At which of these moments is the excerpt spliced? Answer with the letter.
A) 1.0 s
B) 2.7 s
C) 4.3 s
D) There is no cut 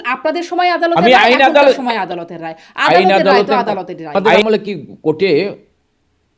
C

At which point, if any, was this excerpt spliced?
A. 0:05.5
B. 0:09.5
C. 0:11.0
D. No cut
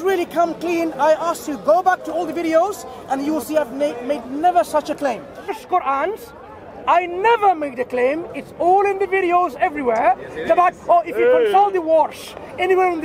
A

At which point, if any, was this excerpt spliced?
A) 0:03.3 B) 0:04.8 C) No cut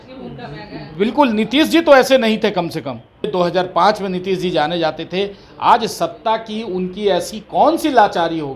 A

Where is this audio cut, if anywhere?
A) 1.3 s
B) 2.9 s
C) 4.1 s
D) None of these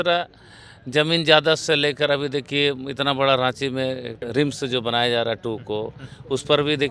C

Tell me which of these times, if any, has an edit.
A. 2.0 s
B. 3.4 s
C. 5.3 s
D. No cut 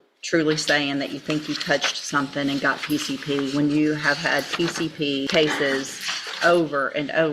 C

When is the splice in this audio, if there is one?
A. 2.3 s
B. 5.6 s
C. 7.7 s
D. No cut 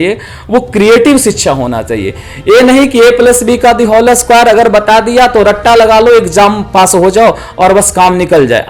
D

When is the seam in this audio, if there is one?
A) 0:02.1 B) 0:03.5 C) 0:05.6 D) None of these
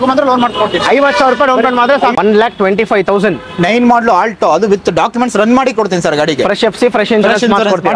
A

